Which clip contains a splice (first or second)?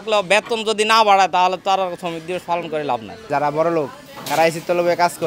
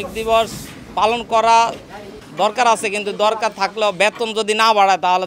first